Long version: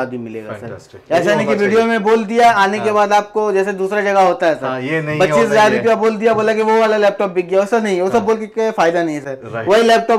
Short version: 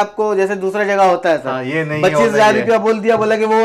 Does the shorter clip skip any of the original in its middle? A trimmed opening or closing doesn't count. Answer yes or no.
no